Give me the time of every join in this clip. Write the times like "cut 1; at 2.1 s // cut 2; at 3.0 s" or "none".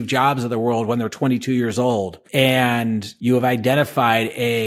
cut 1; at 2.2 s // cut 2; at 3.1 s